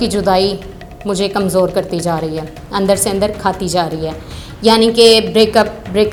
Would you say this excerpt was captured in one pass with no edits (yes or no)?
yes